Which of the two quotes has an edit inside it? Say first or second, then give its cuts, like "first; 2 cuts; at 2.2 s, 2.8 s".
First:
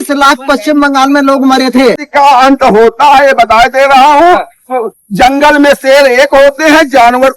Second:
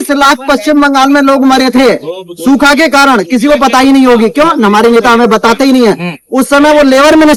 first; 1 cut; at 2.0 s